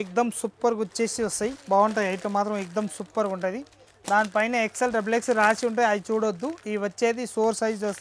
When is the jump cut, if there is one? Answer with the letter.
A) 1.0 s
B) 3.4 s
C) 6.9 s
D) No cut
D